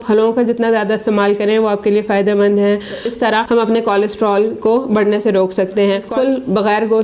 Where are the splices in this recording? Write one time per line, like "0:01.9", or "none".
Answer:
0:03.0
0:06.1